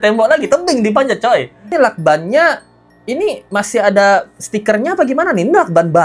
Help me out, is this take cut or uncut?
cut